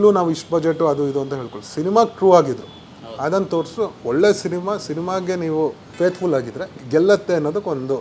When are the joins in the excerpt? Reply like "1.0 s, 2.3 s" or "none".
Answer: none

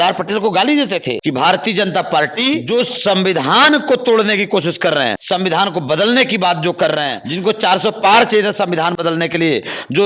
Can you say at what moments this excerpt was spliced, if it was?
1.2 s, 2.6 s, 5.2 s, 7.2 s

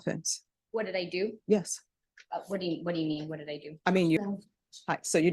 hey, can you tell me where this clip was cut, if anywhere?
4.2 s

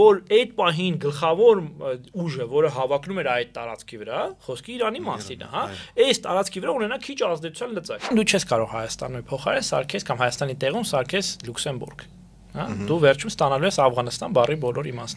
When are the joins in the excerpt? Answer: 8.1 s

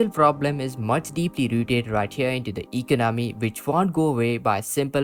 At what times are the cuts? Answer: none

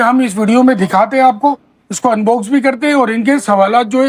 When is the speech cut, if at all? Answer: none

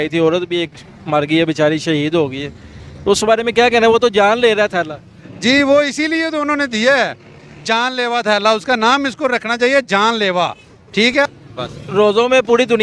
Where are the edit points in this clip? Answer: 11.2 s

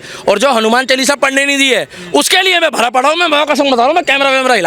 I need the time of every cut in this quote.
none

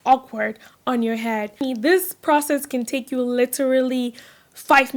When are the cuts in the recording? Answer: 1.5 s

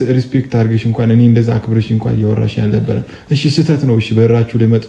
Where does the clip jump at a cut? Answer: none

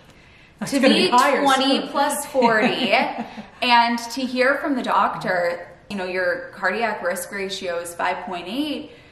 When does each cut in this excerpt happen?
5.9 s

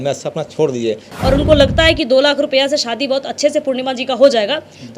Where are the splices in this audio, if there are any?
1.1 s

